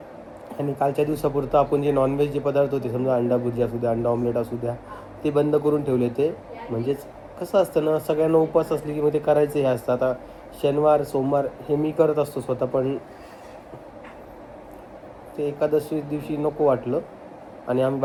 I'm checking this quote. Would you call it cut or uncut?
uncut